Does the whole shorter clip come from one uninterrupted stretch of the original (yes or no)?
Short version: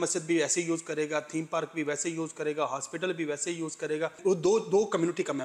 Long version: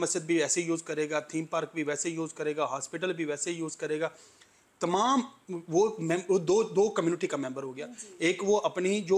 no